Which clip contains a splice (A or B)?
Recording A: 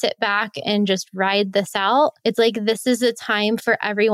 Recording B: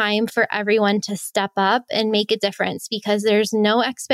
A